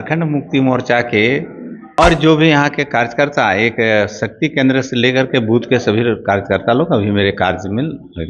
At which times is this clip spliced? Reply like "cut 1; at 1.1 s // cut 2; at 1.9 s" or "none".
cut 1; at 2.0 s